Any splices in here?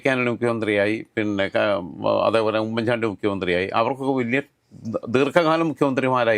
no; 0 cuts

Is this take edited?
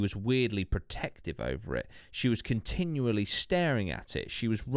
no; 0 cuts

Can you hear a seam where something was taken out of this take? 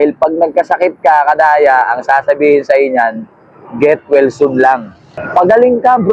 yes; 1 cut; at 4.9 s

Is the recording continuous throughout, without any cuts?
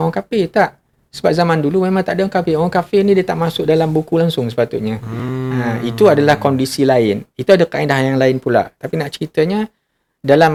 yes; 0 cuts

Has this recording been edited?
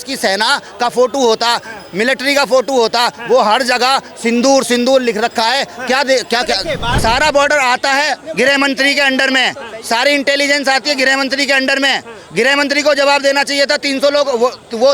yes; 1 cut; at 6.9 s

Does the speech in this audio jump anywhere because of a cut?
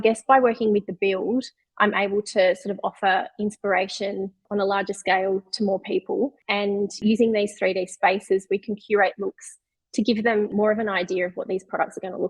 yes; 3 cuts; at 4.4 s, 7.0 s, 10.5 s

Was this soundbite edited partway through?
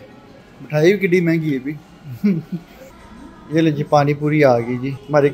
yes; 1 cut; at 2.8 s

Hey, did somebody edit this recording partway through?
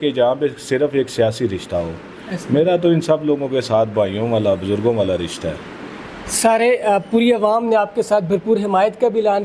no; 0 cuts

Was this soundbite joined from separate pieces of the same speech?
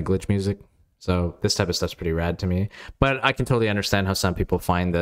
no; 0 cuts

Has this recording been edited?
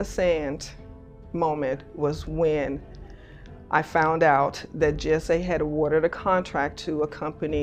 no; 0 cuts

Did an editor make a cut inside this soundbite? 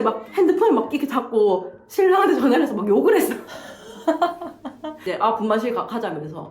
yes; 1 cut; at 5.0 s

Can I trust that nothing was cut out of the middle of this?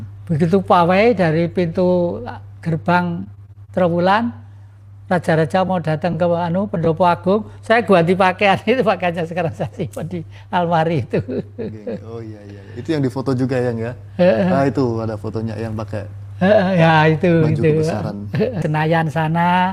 no; 1 cut; at 18.6 s

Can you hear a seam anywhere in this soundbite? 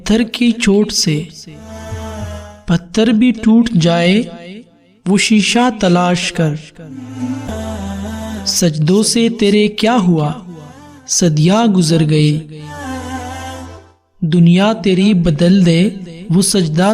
yes; 1 cut; at 7.5 s

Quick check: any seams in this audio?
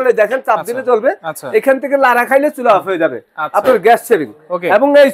no; 0 cuts

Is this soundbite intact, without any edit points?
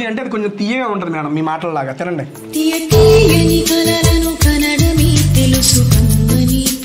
yes; 0 cuts

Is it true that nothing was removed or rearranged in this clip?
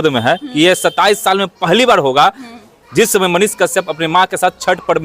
yes; 0 cuts

